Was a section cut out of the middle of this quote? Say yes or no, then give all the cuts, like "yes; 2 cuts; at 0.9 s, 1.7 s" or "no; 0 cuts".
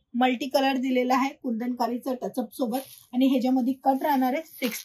no; 0 cuts